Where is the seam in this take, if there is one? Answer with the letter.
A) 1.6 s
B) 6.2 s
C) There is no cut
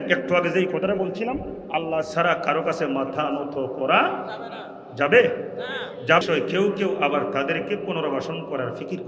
B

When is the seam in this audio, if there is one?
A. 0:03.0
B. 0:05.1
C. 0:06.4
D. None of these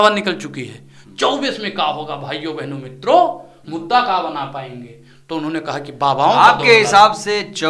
D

